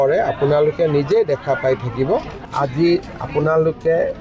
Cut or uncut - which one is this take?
cut